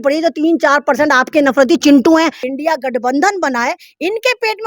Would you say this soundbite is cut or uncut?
cut